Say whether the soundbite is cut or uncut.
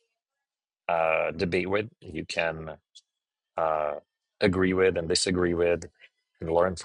uncut